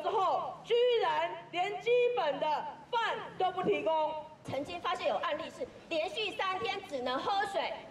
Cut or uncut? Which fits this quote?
cut